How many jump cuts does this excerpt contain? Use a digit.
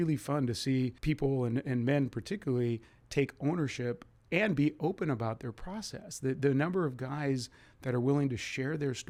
0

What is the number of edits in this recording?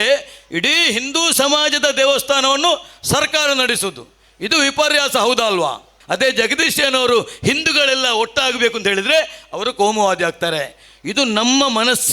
1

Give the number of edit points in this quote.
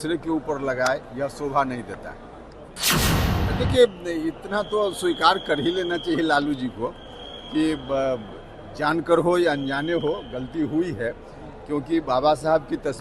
1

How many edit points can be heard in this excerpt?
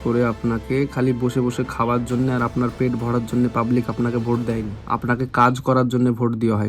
1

